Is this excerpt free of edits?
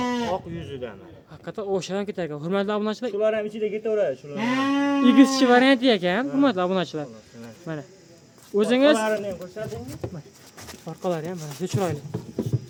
yes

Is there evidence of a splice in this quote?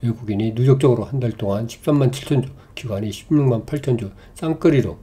no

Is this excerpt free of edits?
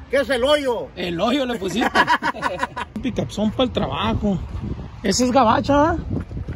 no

